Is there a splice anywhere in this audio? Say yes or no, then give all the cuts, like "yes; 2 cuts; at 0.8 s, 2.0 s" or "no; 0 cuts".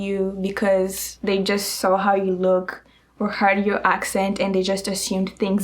no; 0 cuts